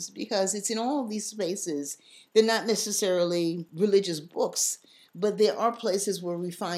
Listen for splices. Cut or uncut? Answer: cut